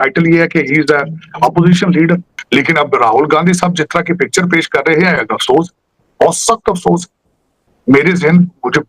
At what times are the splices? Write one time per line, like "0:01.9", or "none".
0:02.4